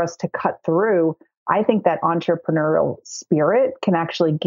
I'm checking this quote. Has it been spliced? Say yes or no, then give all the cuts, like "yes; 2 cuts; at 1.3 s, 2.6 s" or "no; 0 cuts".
no; 0 cuts